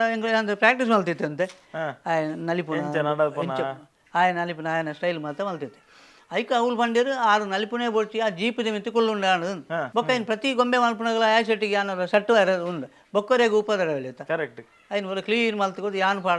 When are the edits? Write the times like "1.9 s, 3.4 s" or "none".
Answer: 9.9 s